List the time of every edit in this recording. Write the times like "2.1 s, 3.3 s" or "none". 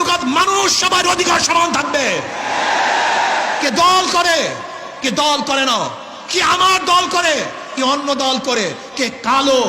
none